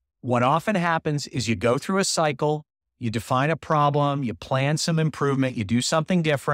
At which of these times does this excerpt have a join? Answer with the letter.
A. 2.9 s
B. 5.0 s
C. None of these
C